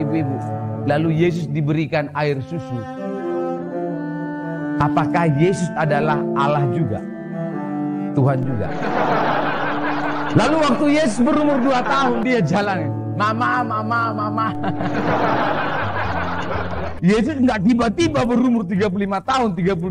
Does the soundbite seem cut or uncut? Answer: cut